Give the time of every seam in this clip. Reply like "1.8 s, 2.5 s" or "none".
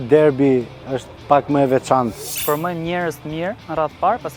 2.3 s